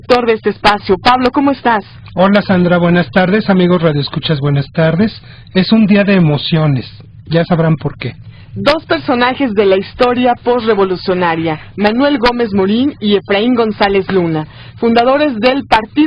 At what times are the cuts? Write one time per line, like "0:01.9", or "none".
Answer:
0:10.6